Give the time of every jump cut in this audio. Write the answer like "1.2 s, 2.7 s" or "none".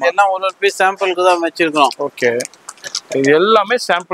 none